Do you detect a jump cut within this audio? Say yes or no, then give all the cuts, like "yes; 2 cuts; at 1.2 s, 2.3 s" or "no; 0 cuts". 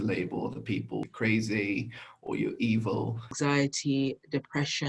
yes; 2 cuts; at 1.0 s, 3.3 s